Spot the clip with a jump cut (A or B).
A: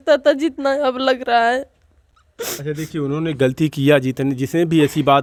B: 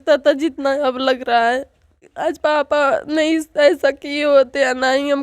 B